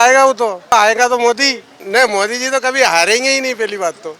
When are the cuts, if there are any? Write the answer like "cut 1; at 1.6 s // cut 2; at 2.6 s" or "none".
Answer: cut 1; at 0.7 s // cut 2; at 1.8 s

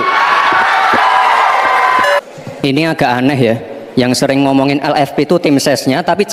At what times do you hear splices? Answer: cut 1; at 2.2 s

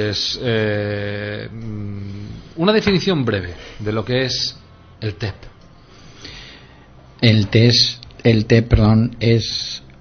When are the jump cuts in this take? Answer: cut 1; at 7.4 s

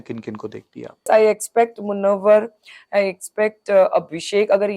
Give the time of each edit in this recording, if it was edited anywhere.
cut 1; at 1.1 s

